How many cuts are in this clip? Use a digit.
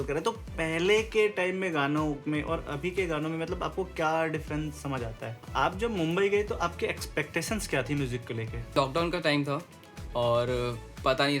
2